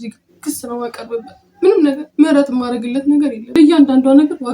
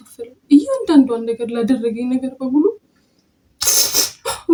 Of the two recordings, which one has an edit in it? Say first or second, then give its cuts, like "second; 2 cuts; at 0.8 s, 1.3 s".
first; 1 cut; at 3.5 s